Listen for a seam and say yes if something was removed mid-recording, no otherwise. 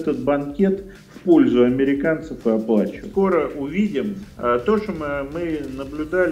yes